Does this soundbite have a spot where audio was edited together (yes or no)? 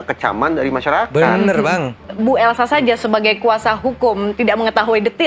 yes